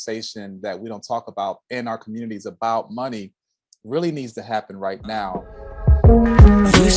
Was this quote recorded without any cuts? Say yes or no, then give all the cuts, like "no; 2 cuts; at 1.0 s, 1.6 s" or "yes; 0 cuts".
no; 1 cut; at 5.8 s